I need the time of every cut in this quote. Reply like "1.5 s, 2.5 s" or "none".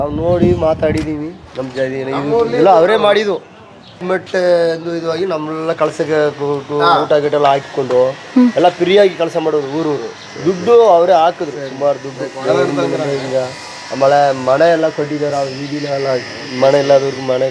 4.0 s